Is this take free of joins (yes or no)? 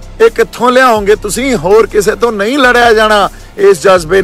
yes